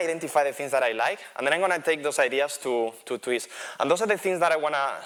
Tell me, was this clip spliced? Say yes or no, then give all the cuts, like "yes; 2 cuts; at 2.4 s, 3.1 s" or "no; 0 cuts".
no; 0 cuts